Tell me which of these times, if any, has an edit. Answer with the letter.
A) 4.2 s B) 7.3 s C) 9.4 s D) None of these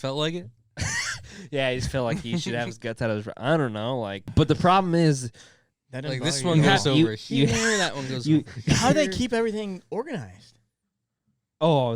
A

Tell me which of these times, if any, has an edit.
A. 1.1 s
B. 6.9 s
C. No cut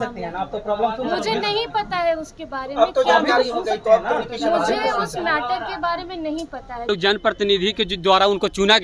B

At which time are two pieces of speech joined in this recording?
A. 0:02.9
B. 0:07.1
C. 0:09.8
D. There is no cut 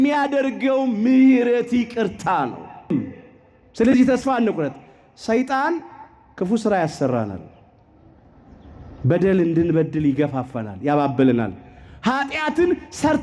A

